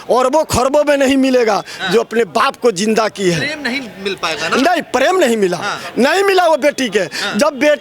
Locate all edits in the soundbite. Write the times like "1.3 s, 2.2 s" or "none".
none